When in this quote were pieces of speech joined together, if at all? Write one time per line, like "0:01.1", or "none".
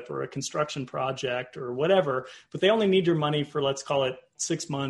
none